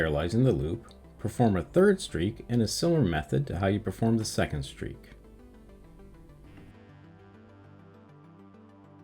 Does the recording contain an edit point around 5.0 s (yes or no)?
yes